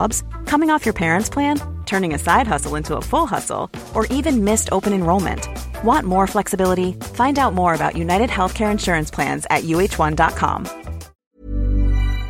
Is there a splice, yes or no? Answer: yes